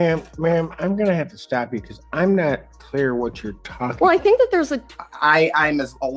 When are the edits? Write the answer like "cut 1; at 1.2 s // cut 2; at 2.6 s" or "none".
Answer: cut 1; at 4.8 s

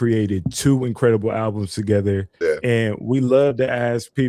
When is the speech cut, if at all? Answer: cut 1; at 2.3 s

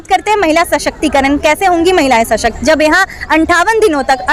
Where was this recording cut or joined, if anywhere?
none

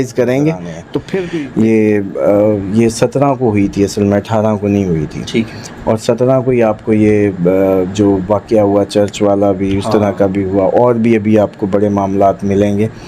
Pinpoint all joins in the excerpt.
cut 1; at 0.9 s

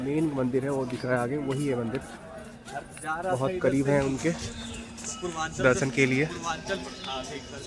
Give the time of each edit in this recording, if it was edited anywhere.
none

